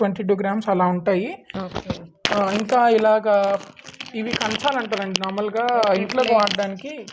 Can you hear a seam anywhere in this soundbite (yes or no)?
no